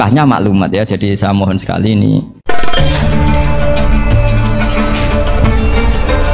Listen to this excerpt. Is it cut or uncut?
cut